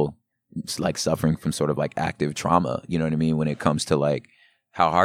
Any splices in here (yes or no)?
no